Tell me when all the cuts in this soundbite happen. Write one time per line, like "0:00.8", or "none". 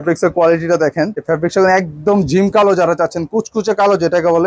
none